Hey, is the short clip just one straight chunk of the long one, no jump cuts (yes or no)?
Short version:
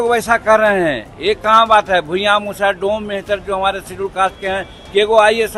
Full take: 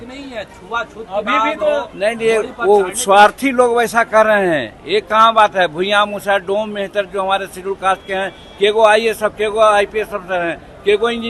yes